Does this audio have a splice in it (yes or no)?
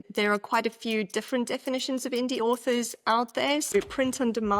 yes